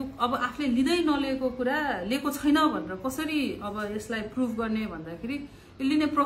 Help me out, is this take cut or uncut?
uncut